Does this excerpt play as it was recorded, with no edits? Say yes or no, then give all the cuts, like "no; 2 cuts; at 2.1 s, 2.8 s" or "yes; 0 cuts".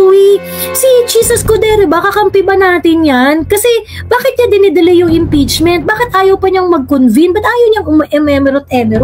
yes; 0 cuts